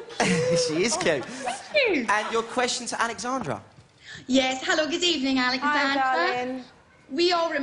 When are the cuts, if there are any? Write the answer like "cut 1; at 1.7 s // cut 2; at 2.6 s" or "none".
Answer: none